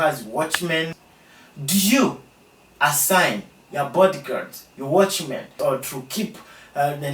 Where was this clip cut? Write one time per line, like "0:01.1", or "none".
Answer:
0:01.0
0:05.5